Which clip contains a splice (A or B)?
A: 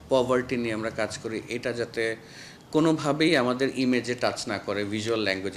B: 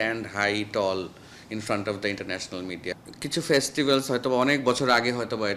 B